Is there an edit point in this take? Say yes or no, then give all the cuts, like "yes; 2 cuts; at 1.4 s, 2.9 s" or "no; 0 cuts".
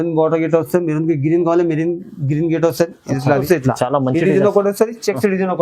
yes; 1 cut; at 3.4 s